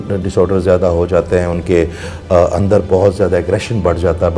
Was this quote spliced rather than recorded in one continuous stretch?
no; 0 cuts

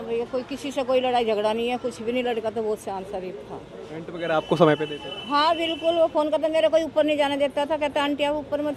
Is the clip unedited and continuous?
yes; 0 cuts

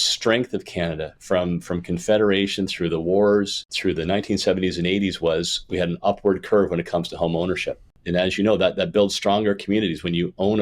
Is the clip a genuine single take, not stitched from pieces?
no; 2 cuts; at 3.6 s, 7.9 s

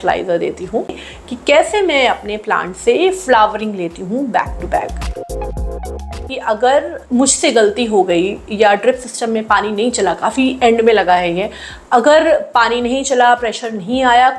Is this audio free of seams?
no; 2 cuts; at 1.0 s, 6.3 s

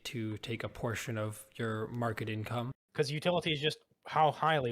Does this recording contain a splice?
yes; 1 cut; at 2.8 s

